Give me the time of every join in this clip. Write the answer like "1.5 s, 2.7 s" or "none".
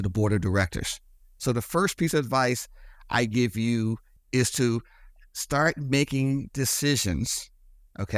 4.1 s